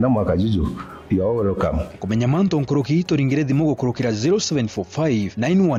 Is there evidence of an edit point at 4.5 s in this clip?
no; 0 cuts

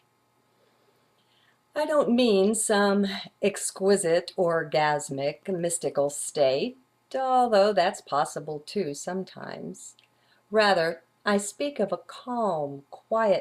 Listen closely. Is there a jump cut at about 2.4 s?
yes; 1 cut; at 2.4 s

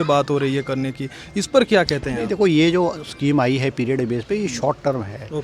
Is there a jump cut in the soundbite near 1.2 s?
no; 0 cuts

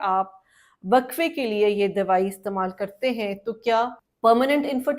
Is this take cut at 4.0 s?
yes; 1 cut; at 4.0 s

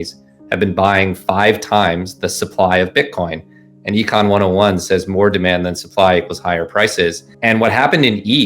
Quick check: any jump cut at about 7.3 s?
yes; 1 cut; at 7.3 s

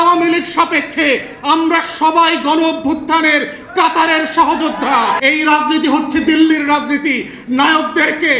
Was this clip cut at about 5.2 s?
yes; 1 cut; at 5.2 s

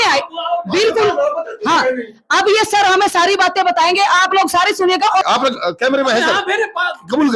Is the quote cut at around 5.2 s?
yes; 1 cut; at 5.2 s

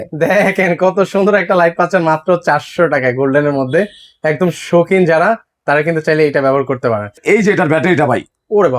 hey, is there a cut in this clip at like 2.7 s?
no; 1 cut; at 7.2 s

